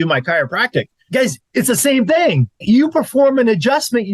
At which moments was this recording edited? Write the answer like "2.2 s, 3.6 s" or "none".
1.1 s, 2.6 s